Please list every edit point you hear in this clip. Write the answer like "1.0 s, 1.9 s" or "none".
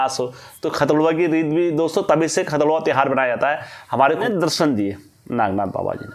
4.2 s